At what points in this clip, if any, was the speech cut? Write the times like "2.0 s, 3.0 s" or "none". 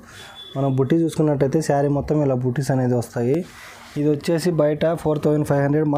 none